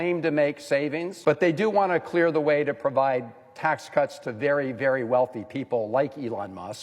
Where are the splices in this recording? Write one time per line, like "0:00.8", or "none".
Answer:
0:01.1